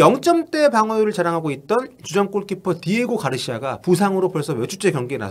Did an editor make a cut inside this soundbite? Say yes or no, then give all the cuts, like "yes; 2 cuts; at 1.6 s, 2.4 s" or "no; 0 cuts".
no; 0 cuts